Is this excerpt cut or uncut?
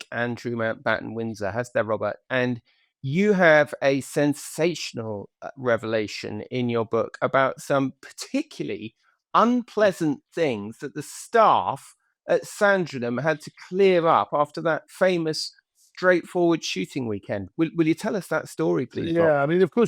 uncut